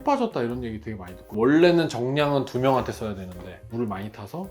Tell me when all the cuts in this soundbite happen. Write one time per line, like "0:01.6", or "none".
0:01.2